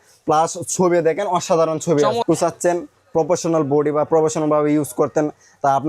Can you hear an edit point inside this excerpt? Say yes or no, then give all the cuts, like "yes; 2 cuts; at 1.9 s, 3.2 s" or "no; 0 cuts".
yes; 1 cut; at 2.2 s